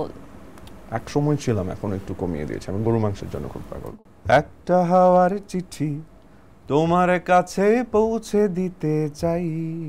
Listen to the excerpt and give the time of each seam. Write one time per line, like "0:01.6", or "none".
0:03.8